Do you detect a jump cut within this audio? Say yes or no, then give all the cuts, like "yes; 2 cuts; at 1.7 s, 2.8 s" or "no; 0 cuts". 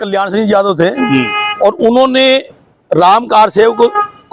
no; 0 cuts